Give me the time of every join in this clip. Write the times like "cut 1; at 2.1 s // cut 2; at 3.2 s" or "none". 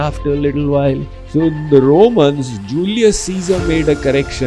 cut 1; at 1.1 s